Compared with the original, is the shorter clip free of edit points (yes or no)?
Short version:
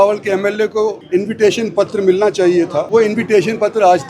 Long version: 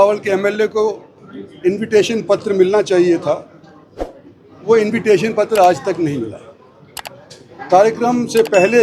no